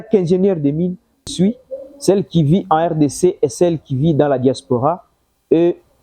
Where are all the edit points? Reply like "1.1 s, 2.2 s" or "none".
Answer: 1.2 s